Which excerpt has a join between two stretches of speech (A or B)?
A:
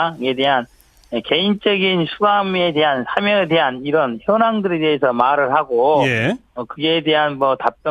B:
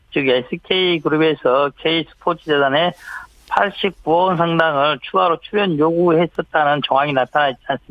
A